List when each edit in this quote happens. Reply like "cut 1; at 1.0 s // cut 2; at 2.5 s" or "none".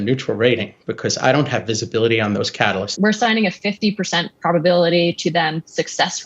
cut 1; at 2.9 s